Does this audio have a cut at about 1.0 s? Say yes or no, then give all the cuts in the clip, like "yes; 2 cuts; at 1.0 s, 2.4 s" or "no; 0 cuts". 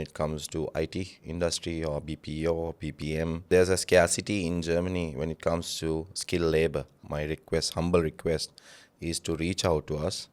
no; 2 cuts; at 3.5 s, 7.0 s